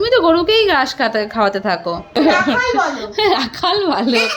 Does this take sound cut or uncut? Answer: cut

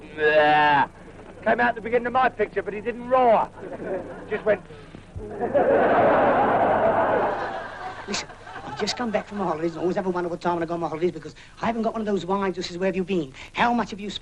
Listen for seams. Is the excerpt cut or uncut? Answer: cut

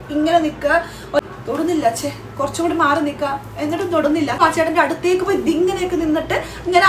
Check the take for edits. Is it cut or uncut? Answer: cut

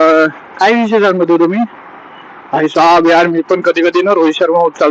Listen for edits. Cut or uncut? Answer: uncut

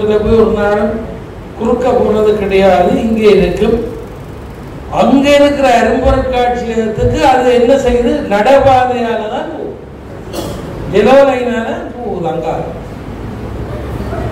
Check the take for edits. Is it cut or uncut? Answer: uncut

